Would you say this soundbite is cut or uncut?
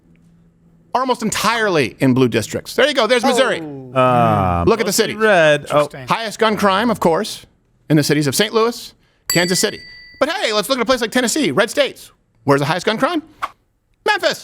uncut